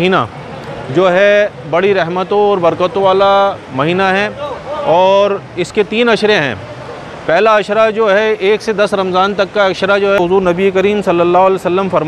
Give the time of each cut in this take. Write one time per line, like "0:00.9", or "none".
0:10.2